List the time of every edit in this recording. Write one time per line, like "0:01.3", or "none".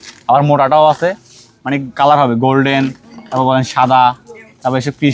none